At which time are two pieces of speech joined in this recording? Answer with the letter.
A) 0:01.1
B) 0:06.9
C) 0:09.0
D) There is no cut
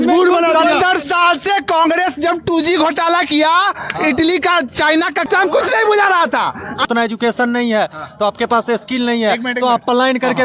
B